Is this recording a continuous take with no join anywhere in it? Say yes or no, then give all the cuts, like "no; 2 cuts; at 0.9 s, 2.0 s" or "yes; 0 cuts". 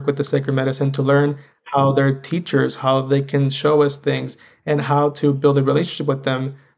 yes; 0 cuts